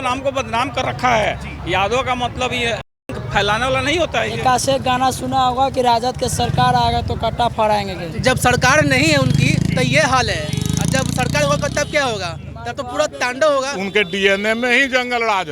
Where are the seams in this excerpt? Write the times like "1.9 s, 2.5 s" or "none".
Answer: 4.3 s, 8.1 s, 13.8 s